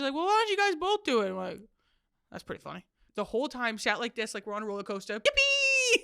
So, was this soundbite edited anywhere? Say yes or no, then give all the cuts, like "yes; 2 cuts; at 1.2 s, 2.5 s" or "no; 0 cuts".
yes; 2 cuts; at 3.0 s, 5.2 s